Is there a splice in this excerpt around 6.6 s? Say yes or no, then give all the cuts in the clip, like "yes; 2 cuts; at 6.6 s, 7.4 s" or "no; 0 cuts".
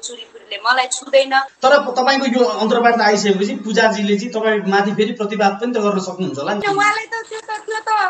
yes; 2 cuts; at 1.5 s, 6.6 s